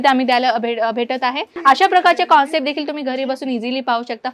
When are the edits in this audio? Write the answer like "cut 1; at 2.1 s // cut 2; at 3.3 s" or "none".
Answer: cut 1; at 1.5 s